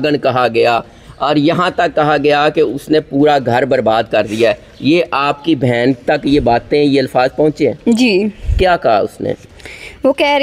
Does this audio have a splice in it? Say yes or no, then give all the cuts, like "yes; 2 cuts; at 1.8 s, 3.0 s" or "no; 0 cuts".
no; 0 cuts